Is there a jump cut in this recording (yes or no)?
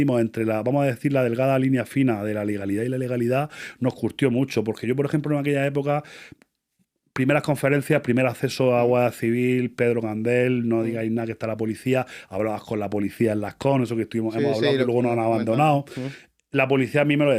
no